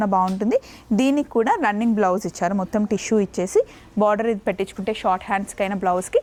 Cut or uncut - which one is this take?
uncut